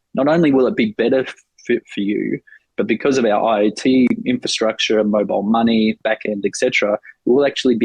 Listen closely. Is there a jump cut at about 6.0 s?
yes; 1 cut; at 6.0 s

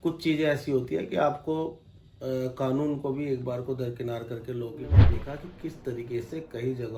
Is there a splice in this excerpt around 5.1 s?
yes; 1 cut; at 5.1 s

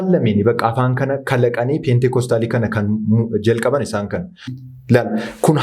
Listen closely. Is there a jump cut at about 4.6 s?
yes; 1 cut; at 4.6 s

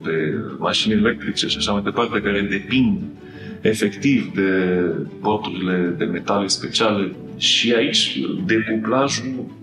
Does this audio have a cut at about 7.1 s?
yes; 2 cuts; at 5.1 s, 7.1 s

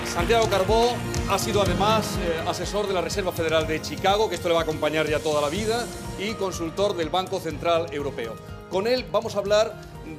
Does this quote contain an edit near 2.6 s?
no; 1 cut; at 8.6 s

